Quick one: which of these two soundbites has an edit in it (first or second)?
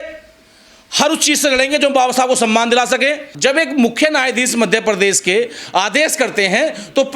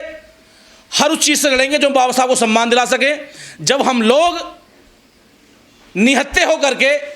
first